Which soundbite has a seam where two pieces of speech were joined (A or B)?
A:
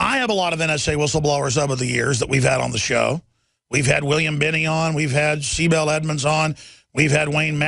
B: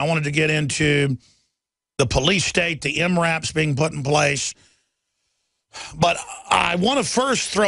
A